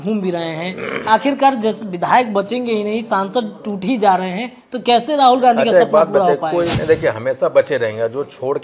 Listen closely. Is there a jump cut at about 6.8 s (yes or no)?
yes